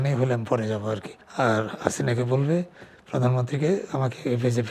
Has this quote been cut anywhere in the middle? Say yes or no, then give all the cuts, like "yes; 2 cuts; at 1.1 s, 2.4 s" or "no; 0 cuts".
yes; 1 cut; at 1.2 s